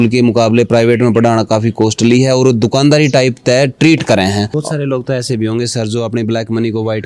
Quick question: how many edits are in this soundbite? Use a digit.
1